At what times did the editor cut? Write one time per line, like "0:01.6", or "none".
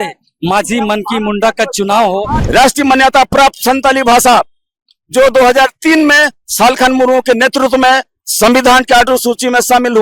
0:02.4